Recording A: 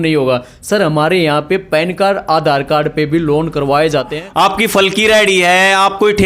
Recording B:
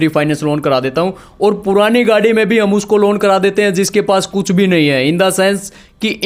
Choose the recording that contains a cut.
A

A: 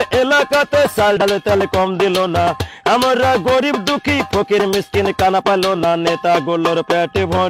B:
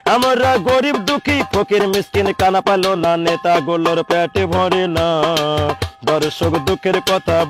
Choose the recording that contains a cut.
A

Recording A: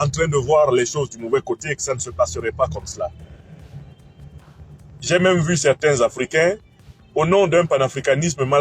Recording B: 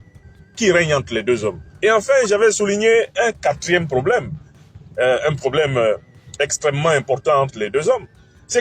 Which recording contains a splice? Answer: B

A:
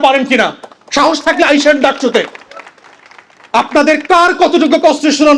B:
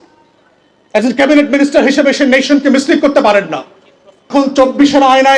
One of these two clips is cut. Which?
B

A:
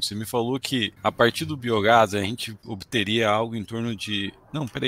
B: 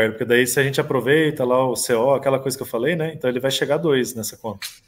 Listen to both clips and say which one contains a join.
A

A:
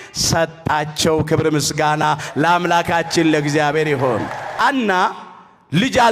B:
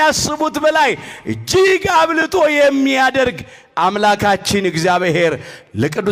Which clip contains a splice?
A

